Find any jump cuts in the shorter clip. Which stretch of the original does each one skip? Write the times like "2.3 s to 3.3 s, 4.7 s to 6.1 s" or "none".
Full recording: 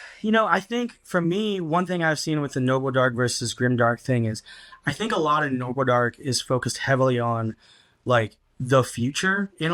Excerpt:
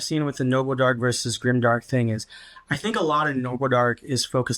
none